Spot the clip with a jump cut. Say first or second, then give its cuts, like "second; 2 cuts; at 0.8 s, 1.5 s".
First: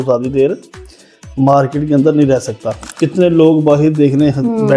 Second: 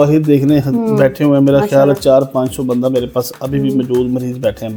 first; 1 cut; at 2.8 s